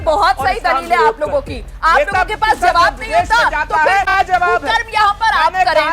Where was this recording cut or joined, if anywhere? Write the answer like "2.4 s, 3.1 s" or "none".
1.8 s, 4.2 s